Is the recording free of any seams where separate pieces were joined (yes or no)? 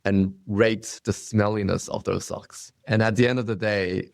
no